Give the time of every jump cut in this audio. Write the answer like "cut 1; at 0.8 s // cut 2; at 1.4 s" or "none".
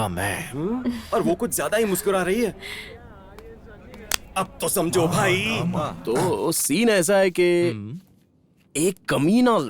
cut 1; at 5.9 s